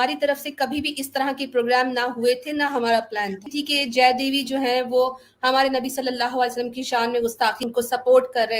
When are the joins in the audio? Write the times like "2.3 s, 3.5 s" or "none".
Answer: 3.5 s, 7.7 s